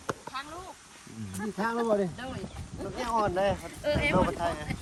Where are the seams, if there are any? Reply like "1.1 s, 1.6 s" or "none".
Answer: none